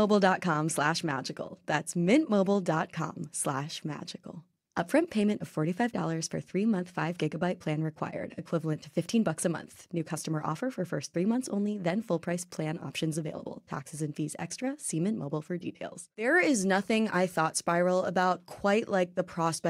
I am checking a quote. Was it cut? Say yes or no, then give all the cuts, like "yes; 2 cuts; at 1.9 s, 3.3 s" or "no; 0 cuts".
no; 0 cuts